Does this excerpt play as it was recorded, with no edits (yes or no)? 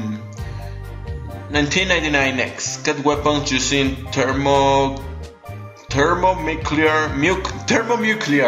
yes